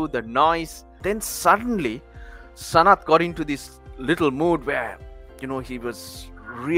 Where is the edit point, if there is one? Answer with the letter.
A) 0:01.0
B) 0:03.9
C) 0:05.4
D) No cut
A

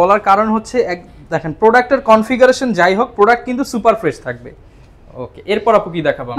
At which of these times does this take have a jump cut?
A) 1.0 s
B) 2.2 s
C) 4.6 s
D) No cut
D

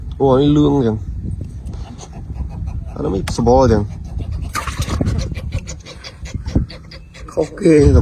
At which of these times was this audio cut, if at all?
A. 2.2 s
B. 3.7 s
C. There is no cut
C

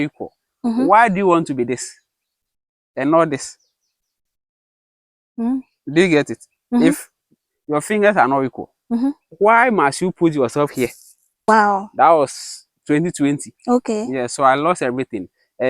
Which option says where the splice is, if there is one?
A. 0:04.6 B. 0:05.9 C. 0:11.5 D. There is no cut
C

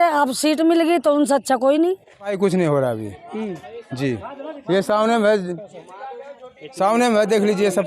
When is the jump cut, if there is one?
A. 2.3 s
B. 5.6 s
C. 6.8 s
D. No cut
A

